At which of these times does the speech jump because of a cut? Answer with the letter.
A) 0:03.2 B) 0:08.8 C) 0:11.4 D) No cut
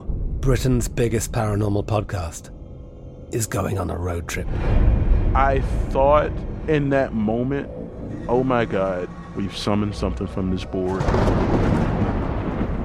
D